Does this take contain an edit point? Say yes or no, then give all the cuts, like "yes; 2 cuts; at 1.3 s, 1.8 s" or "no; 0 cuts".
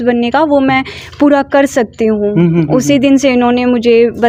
no; 0 cuts